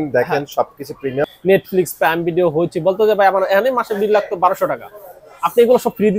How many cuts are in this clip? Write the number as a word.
one